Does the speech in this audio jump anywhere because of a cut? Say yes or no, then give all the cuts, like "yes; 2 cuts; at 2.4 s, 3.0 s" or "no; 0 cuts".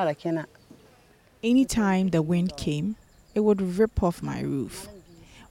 yes; 1 cut; at 1.4 s